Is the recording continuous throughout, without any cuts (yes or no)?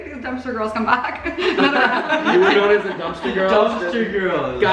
yes